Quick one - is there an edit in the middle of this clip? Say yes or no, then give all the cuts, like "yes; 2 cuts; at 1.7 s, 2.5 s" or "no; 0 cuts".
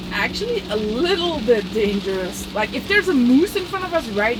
no; 0 cuts